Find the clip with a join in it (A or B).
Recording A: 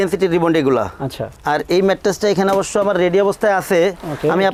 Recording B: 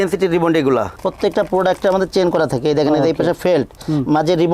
B